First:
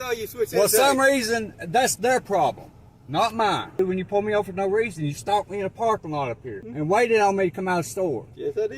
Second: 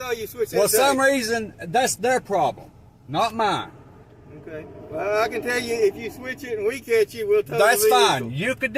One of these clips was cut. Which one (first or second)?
first